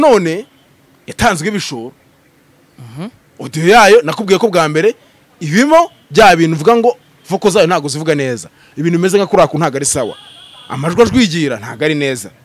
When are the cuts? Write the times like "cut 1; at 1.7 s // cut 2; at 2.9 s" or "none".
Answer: none